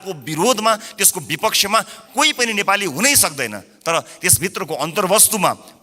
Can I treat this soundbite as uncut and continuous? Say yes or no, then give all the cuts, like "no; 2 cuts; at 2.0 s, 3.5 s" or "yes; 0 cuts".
yes; 0 cuts